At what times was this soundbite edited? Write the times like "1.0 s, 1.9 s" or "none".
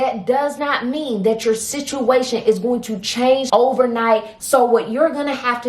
3.4 s, 4.3 s